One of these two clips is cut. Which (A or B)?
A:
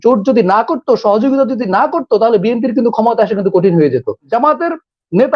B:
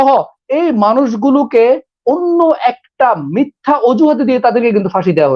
A